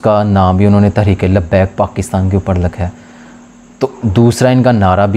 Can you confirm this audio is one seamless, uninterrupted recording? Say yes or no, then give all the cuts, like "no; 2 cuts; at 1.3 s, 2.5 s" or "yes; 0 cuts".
yes; 0 cuts